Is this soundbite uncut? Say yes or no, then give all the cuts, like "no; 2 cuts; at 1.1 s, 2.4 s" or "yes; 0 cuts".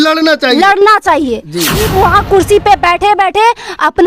no; 1 cut; at 1.8 s